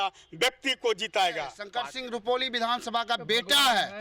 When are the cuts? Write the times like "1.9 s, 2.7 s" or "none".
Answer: 1.6 s